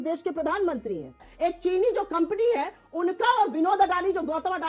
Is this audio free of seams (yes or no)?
no